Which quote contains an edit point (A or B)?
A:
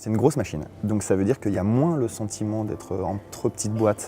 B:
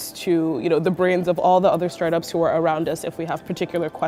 A